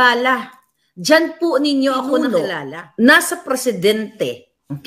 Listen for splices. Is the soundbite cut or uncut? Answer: cut